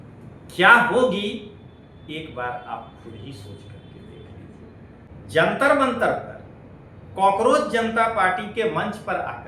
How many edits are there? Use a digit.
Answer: 1